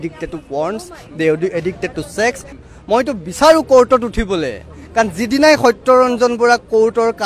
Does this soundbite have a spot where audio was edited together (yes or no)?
yes